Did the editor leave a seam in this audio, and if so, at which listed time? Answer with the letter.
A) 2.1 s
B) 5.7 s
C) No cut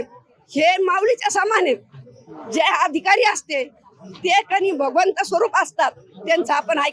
C